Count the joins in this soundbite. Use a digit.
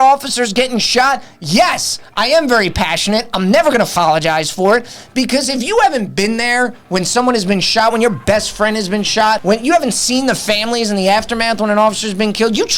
2